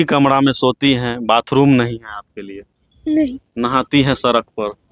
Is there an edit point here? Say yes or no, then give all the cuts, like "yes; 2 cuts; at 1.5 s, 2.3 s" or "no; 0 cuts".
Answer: no; 0 cuts